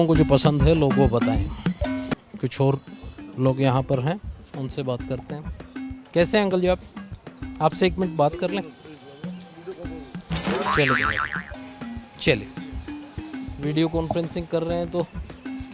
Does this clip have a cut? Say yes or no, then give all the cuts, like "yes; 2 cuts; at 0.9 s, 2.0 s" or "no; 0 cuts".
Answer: no; 0 cuts